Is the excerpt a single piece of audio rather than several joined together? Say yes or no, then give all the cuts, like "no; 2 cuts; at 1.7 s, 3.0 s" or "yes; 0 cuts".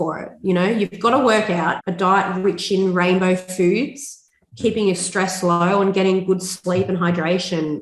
no; 1 cut; at 1.8 s